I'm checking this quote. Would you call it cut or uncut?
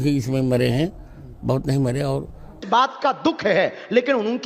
cut